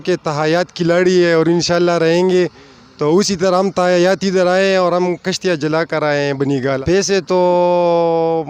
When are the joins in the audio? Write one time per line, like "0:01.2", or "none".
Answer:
0:06.8